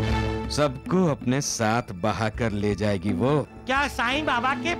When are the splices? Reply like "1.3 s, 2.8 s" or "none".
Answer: 3.5 s